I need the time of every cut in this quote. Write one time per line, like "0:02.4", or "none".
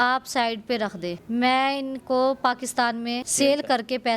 0:03.2